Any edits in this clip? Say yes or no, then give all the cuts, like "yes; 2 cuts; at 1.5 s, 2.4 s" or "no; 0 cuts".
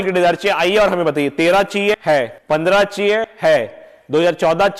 yes; 2 cuts; at 2.0 s, 3.3 s